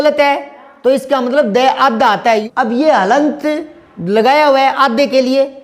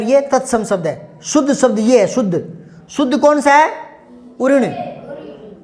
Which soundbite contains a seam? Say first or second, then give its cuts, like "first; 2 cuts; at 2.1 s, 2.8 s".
first; 1 cut; at 2.5 s